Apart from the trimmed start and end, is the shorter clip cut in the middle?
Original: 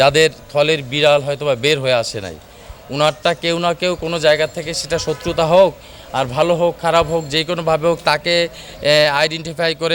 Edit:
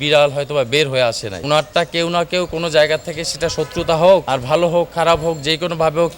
yes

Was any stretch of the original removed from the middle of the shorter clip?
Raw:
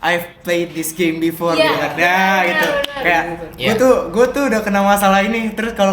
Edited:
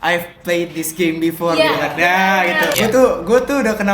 yes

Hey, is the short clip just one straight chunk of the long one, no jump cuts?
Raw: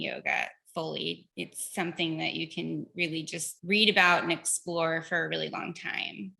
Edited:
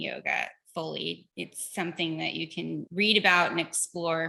no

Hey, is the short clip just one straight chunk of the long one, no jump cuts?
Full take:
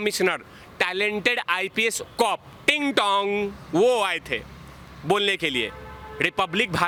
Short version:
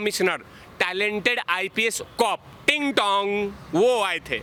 yes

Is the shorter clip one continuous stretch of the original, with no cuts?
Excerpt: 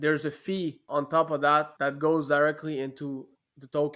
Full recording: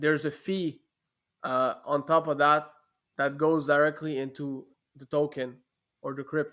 no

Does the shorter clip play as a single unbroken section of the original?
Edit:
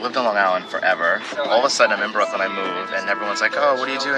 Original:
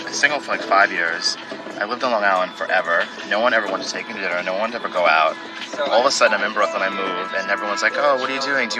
no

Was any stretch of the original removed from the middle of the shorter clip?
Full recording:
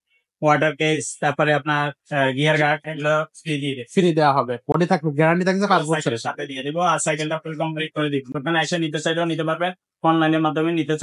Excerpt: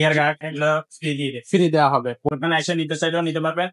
yes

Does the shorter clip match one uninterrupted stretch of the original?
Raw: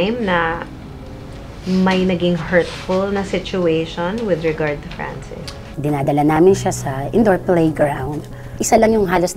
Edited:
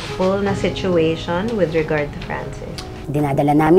yes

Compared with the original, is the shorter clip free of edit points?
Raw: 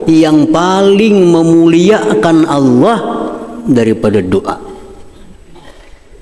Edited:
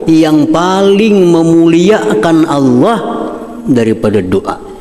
yes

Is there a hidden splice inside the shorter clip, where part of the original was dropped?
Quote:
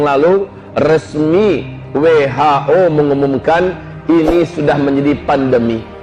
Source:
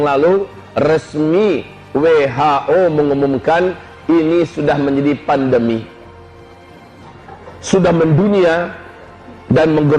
no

